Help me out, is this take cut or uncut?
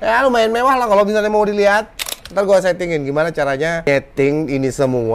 cut